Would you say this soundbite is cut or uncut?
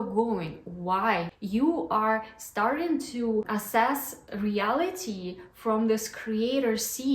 cut